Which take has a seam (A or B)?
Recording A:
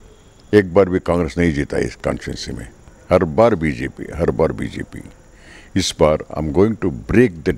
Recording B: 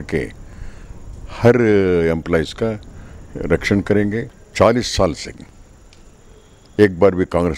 B